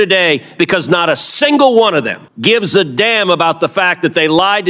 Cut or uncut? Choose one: cut